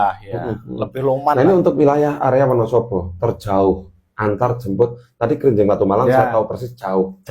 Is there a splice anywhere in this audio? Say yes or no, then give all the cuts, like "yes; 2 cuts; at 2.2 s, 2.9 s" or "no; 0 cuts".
yes; 1 cut; at 1.4 s